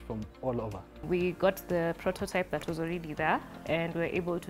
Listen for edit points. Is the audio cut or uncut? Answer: cut